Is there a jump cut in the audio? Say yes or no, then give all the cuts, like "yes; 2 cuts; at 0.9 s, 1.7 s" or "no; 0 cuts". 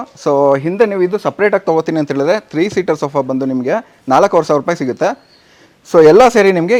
no; 0 cuts